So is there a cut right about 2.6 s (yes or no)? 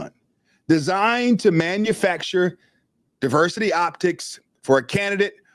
no